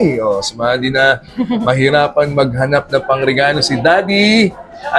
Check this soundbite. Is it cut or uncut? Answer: uncut